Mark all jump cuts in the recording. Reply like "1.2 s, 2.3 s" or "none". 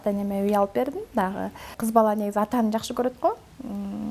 1.8 s

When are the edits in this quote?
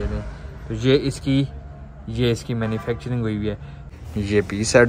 3.8 s

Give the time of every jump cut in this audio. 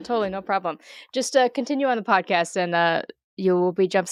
none

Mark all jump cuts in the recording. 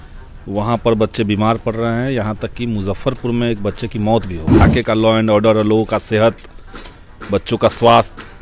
4.6 s

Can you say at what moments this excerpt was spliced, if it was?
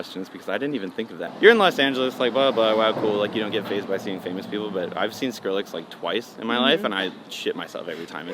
1.3 s

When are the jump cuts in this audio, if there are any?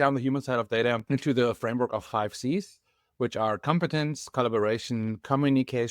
1.0 s

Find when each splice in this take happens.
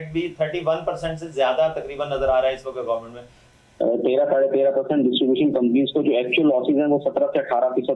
3.4 s

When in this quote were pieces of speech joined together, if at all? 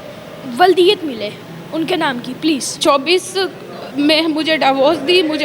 2.7 s

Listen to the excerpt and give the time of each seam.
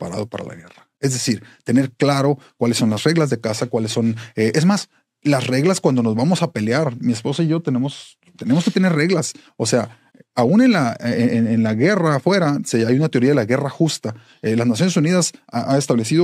none

